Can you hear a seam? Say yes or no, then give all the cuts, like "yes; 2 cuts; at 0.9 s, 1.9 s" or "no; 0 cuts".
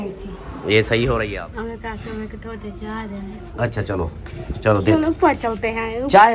yes; 1 cut; at 1.3 s